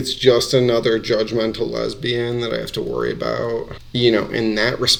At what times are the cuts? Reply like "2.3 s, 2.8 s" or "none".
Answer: none